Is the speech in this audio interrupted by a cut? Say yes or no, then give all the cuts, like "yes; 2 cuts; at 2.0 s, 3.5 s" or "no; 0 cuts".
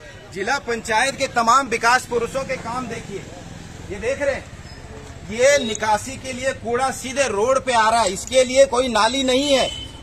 no; 0 cuts